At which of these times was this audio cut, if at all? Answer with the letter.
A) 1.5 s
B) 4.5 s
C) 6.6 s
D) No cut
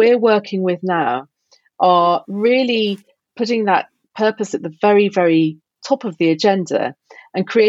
B